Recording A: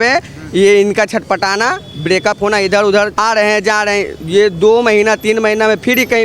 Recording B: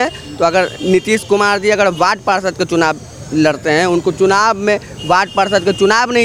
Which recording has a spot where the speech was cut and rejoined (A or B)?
A